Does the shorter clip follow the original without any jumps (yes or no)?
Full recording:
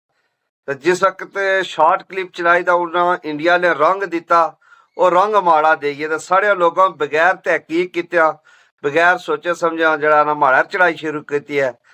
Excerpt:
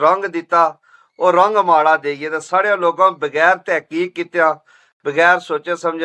yes